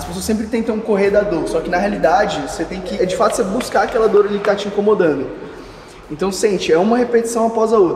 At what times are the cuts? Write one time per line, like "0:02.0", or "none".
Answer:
0:03.0

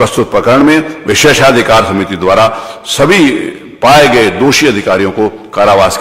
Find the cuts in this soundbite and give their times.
none

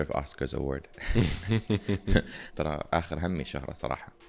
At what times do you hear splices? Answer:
0:02.4

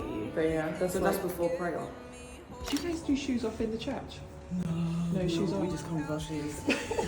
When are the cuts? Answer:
0:02.6

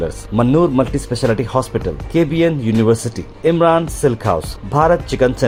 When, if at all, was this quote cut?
none

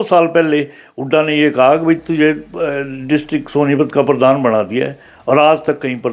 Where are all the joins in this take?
none

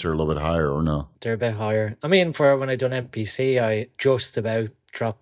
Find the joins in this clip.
0:01.0
0:03.9

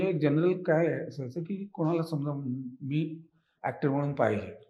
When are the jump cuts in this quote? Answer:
none

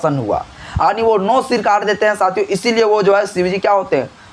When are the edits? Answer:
none

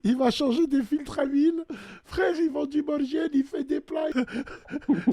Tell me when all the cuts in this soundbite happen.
0:04.1

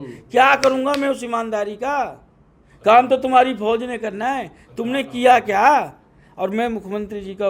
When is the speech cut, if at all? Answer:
none

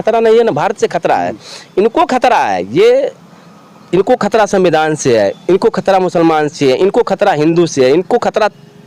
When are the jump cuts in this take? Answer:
none

